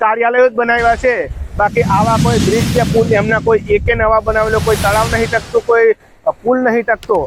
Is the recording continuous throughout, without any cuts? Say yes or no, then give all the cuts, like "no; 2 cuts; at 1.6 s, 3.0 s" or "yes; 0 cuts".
yes; 0 cuts